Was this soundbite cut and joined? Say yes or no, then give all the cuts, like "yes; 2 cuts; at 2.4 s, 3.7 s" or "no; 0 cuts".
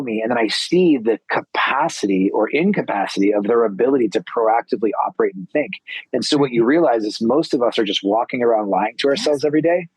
no; 0 cuts